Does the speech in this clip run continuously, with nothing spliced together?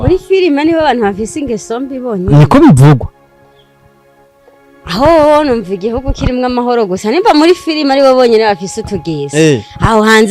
yes; 0 cuts

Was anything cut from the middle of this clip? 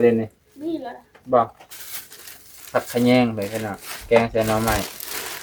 no; 0 cuts

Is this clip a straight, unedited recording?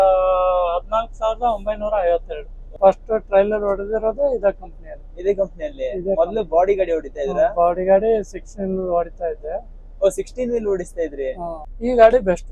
no; 2 cuts; at 2.8 s, 11.6 s

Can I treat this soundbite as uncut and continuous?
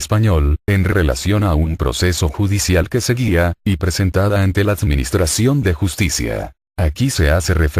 no; 1 cut; at 1.8 s

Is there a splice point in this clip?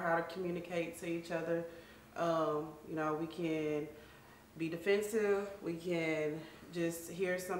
no; 0 cuts

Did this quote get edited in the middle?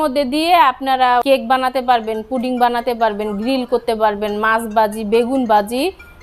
yes; 1 cut; at 1.2 s

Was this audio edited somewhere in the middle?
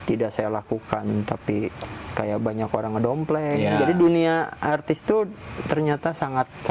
no; 0 cuts

